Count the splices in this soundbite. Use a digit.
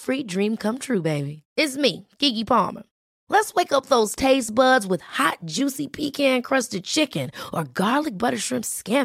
0